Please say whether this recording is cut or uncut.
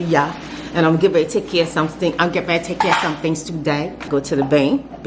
cut